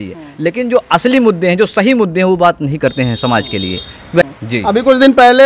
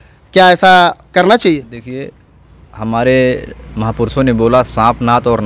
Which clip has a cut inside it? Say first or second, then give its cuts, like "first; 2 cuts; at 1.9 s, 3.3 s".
first; 1 cut; at 4.2 s